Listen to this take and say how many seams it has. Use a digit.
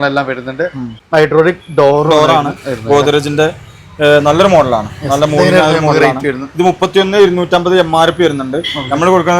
1